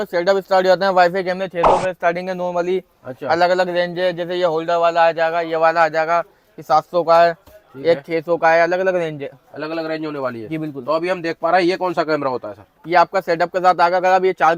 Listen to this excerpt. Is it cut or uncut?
uncut